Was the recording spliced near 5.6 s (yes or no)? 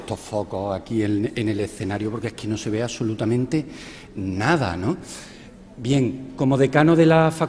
no